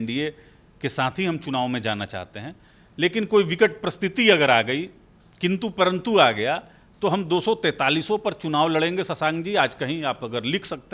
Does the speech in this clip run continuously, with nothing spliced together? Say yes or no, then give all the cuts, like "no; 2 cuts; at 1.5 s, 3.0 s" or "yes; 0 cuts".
yes; 0 cuts